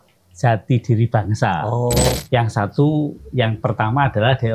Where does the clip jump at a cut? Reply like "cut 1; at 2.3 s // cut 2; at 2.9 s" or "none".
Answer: cut 1; at 2.2 s